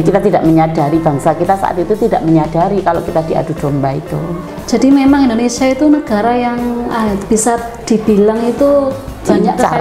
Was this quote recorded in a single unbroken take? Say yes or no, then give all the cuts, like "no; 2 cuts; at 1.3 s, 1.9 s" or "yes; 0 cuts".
no; 1 cut; at 4.5 s